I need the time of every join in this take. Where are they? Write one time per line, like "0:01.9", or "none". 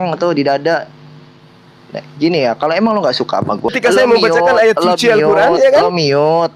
0:03.7

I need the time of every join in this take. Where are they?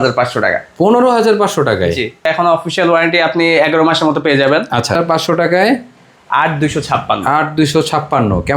0:02.3
0:05.0

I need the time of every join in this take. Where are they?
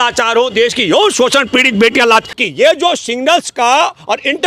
0:02.3

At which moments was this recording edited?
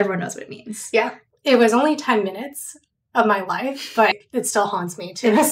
0:01.2

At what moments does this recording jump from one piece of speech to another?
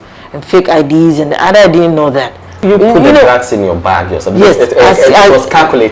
0:02.6

